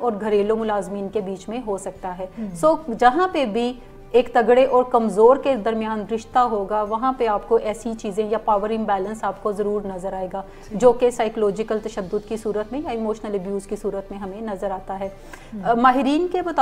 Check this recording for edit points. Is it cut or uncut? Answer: uncut